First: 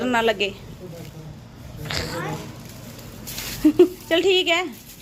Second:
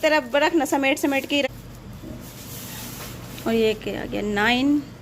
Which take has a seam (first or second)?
second